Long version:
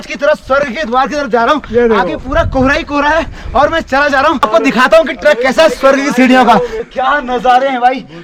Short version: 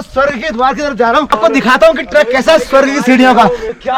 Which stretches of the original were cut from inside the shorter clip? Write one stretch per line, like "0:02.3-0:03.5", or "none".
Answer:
0:01.6-0:04.4